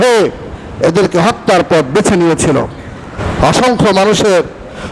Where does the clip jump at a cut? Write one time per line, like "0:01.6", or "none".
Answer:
0:03.1